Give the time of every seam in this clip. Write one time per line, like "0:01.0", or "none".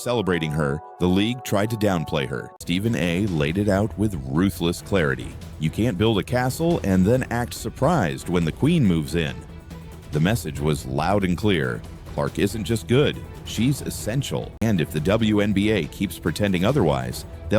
0:02.5
0:14.5